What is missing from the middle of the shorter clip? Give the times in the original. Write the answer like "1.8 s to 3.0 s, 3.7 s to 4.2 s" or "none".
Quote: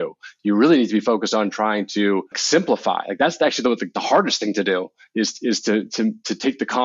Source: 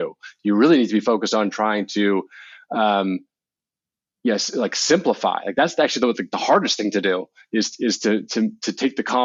2.4 s to 4.8 s